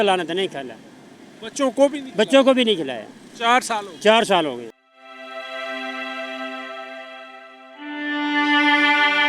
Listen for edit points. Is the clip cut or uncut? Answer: uncut